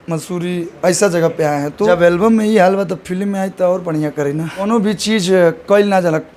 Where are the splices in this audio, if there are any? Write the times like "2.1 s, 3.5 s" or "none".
1.9 s, 4.6 s